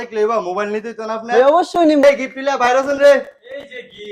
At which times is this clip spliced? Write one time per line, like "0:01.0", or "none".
0:02.0